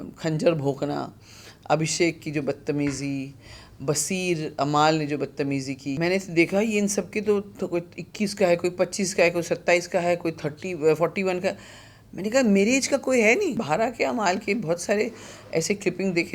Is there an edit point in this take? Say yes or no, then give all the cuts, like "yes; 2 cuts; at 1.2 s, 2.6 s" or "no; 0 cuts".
yes; 2 cuts; at 6.0 s, 13.6 s